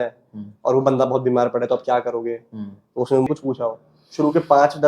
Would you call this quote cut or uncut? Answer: cut